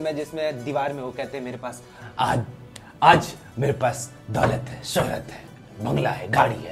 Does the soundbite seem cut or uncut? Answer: uncut